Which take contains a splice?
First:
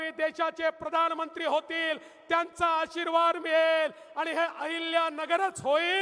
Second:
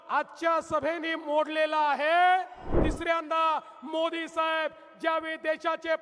second; 1 cut; at 2.8 s

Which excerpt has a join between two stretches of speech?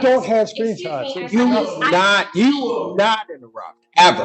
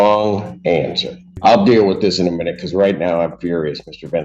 second; 1 cut; at 1.4 s

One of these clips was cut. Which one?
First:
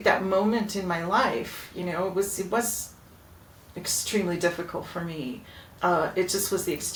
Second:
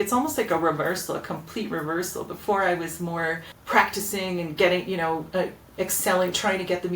second; 1 cut; at 3.5 s

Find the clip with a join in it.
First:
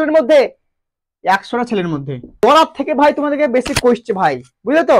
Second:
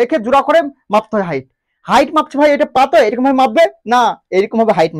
first; 1 cut; at 2.3 s

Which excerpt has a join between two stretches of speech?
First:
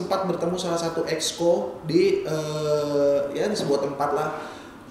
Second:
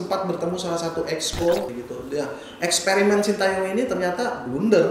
second; 1 cut; at 1.7 s

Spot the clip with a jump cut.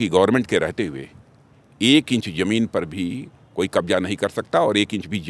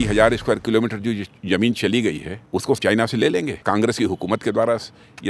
second; 2 cuts; at 2.7 s, 3.6 s

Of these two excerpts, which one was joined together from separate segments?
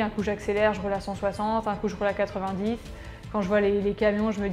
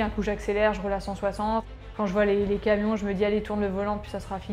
second; 1 cut; at 1.6 s

